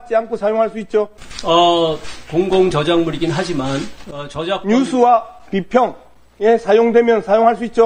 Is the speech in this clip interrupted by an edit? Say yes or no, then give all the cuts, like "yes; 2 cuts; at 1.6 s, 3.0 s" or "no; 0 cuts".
yes; 1 cut; at 1.2 s